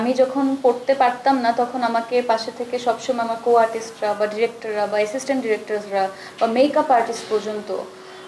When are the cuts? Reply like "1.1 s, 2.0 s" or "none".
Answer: none